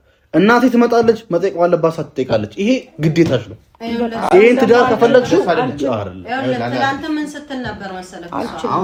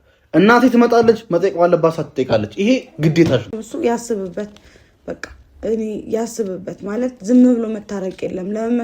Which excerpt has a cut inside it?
second; 1 cut; at 3.6 s

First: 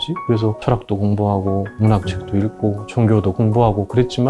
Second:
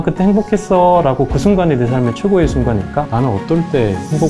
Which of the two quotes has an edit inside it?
second; 1 cut; at 3.1 s

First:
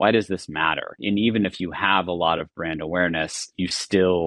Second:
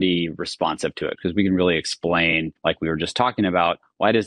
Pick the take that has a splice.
second; 2 cuts; at 1.2 s, 2.5 s

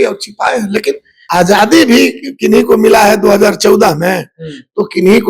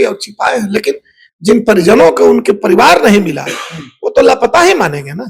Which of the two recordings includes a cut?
first; 1 cut; at 1.1 s

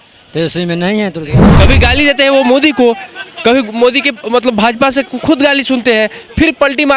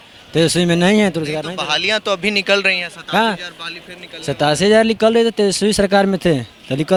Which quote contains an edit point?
first; 1 cut; at 1.4 s

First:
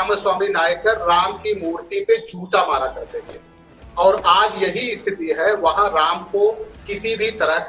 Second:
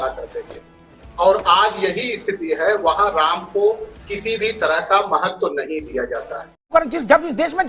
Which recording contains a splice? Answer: second; 1 cut; at 6.7 s

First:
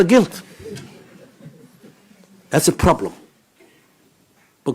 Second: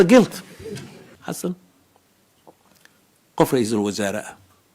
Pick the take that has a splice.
second; 1 cut; at 1.0 s

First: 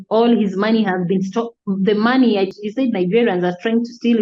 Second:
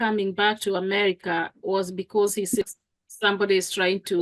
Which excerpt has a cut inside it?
first; 1 cut; at 2.5 s

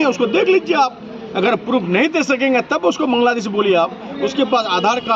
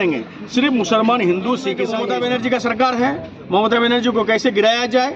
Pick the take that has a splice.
second; 1 cut; at 1.9 s

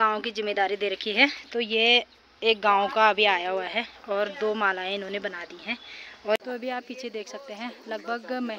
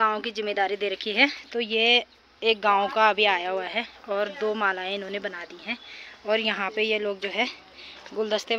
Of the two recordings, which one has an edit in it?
first; 1 cut; at 6.4 s

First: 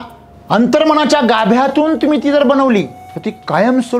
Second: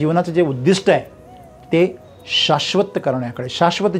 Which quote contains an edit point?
first; 1 cut; at 3.0 s

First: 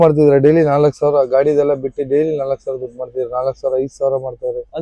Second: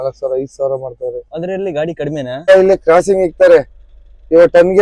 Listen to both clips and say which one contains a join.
second; 1 cut; at 2.5 s

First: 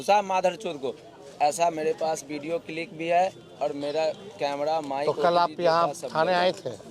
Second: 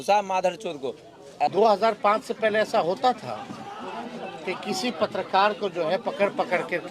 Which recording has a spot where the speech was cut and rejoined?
second; 1 cut; at 1.5 s

